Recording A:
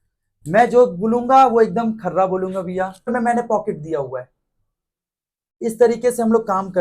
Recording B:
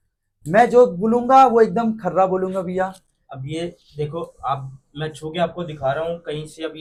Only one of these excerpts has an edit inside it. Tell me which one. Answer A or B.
A